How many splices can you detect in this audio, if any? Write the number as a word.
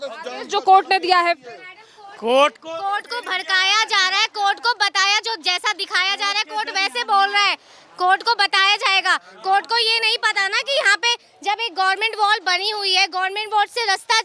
zero